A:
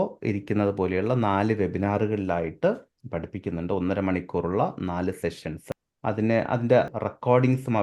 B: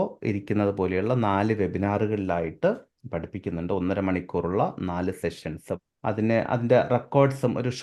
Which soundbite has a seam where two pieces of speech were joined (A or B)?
A